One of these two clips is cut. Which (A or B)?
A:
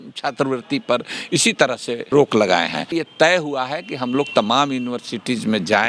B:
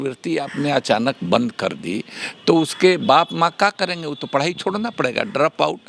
A